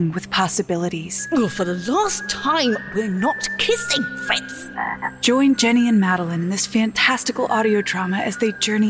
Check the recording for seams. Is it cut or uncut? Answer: cut